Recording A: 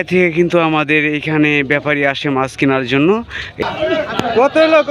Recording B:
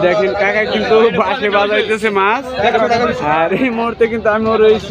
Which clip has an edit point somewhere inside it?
A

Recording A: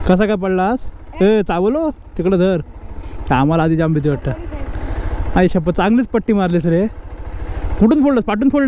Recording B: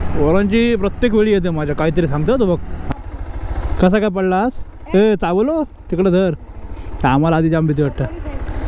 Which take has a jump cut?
B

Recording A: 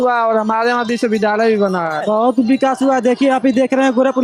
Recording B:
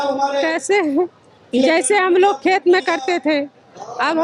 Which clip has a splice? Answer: A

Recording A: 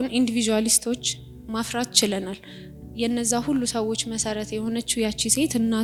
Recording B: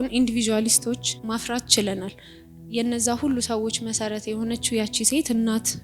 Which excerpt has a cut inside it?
B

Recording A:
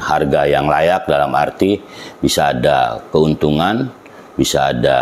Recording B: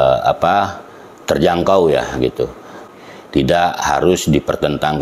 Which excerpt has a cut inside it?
B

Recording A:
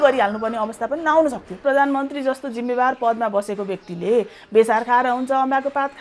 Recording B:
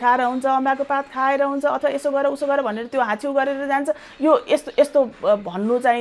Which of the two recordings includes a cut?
A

